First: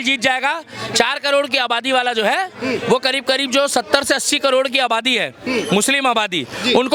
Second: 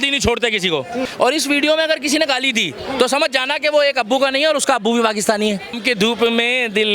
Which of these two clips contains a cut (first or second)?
second